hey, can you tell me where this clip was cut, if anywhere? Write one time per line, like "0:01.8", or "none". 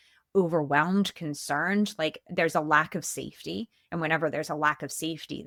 none

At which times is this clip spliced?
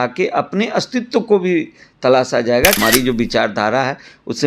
0:02.8

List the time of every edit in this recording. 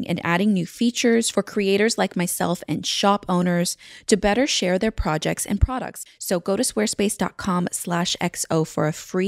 0:06.0

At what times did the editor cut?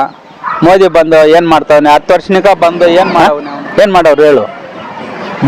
0:03.1

